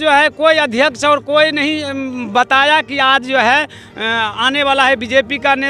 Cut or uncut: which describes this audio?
uncut